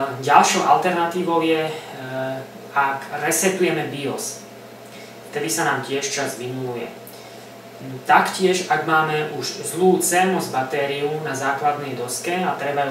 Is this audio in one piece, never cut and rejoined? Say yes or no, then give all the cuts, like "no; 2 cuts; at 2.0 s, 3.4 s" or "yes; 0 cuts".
yes; 0 cuts